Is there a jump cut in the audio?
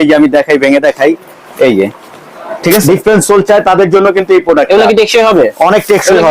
yes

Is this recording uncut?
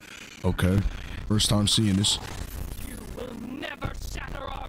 yes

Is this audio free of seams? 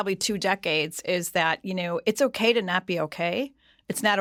yes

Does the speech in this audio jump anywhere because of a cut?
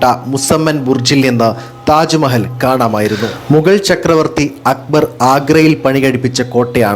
yes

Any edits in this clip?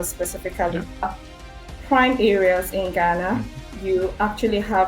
yes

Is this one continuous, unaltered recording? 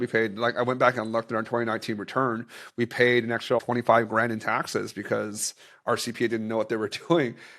no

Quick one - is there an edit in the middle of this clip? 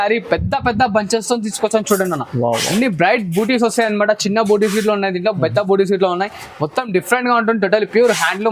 no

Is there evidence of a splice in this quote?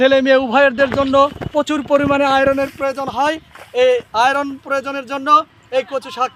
no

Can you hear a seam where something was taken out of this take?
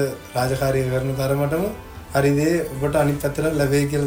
no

